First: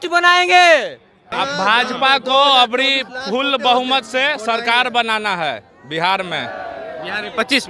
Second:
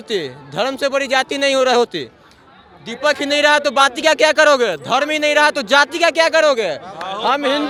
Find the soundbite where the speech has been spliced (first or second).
first